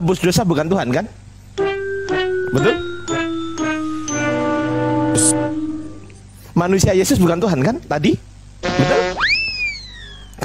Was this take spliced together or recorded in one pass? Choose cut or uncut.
uncut